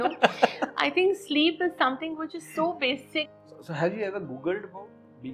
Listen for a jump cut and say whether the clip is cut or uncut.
cut